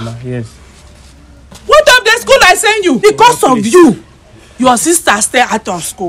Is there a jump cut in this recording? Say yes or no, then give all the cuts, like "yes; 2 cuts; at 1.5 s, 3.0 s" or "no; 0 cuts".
yes; 1 cut; at 3.0 s